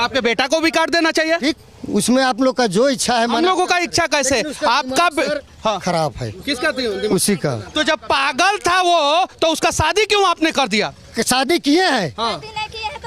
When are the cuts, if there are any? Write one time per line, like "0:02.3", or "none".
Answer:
none